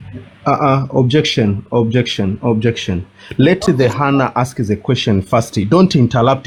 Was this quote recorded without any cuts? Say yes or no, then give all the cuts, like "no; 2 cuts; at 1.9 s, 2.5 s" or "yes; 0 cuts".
yes; 0 cuts